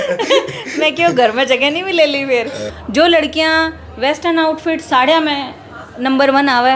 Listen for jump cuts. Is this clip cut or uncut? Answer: cut